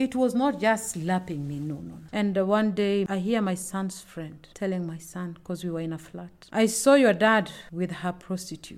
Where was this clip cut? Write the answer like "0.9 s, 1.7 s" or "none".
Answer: 1.9 s, 7.6 s